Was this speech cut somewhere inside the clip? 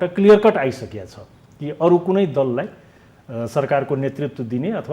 no; 0 cuts

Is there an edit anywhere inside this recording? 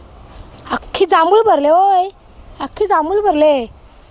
no; 0 cuts

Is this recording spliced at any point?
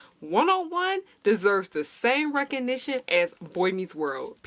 no; 0 cuts

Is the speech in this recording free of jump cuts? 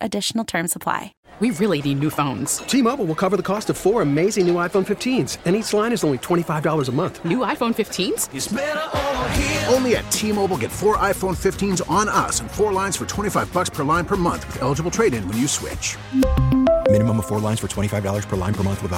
no; 1 cut; at 1.2 s

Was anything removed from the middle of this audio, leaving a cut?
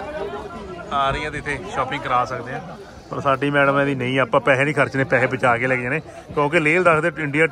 no; 0 cuts

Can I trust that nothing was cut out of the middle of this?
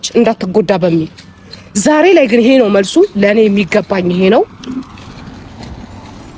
yes; 0 cuts

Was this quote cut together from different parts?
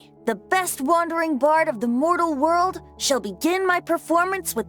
no; 0 cuts

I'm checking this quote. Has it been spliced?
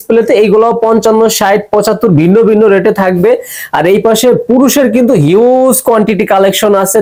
no; 0 cuts

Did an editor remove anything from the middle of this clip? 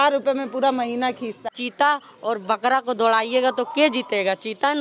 yes; 1 cut; at 1.4 s

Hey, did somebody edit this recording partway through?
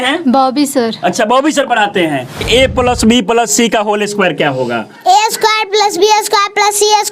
yes; 1 cut; at 2.4 s

